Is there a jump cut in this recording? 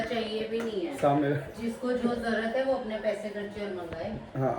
no; 0 cuts

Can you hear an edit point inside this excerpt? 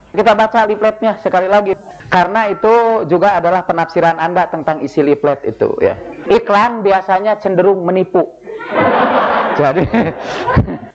yes; 1 cut; at 1.8 s

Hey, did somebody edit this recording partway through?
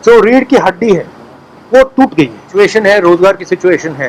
yes; 1 cut; at 2.4 s

